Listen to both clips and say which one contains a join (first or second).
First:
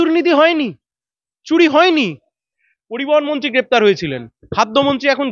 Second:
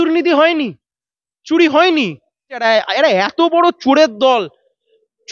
first